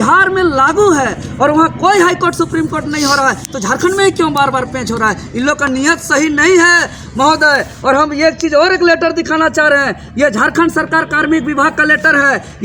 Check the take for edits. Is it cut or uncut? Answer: uncut